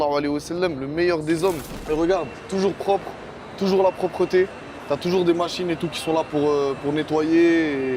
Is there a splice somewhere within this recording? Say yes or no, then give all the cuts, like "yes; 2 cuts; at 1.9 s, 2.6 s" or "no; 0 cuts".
yes; 1 cut; at 1.7 s